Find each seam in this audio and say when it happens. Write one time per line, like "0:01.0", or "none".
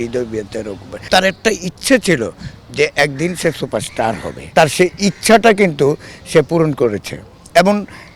0:01.1
0:04.5